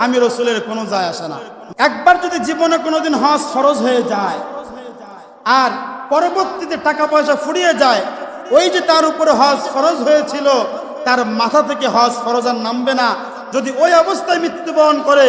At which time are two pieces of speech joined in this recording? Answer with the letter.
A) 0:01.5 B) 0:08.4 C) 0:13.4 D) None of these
A